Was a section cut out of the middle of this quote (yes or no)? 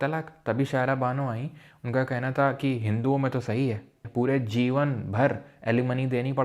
yes